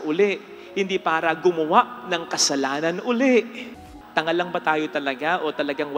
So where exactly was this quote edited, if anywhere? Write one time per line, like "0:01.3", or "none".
0:03.6